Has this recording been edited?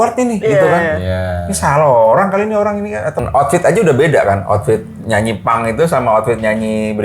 yes; 1 cut; at 3.2 s

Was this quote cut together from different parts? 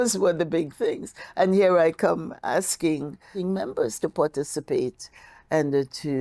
yes; 1 cut; at 3.3 s

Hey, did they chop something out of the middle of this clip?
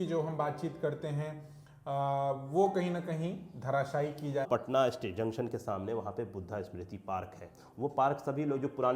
yes; 1 cut; at 4.5 s

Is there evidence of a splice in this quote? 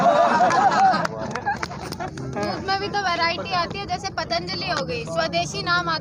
no; 0 cuts

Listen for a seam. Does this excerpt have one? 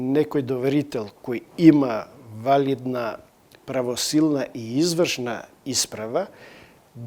no; 0 cuts

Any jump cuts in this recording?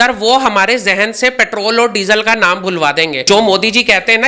yes; 1 cut; at 3.2 s

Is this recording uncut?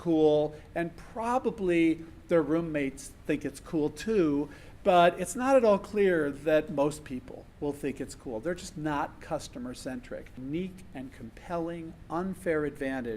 no; 1 cut; at 10.3 s

